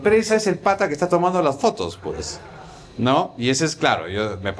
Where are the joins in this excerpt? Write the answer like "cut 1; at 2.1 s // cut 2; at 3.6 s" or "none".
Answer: none